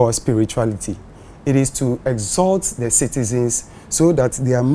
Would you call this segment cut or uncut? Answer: uncut